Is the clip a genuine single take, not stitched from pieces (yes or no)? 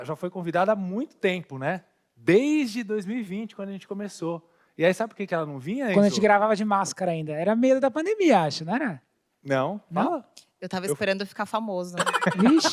yes